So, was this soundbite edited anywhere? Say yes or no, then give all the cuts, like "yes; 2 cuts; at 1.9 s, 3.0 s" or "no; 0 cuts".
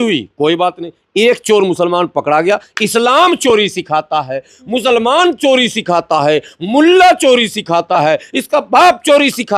no; 0 cuts